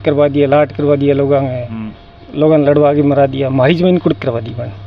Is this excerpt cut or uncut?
uncut